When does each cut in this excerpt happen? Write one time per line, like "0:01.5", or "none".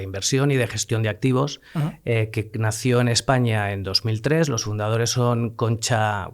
none